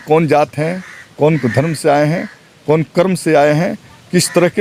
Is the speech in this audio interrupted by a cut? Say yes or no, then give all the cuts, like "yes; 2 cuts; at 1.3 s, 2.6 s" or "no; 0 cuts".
no; 0 cuts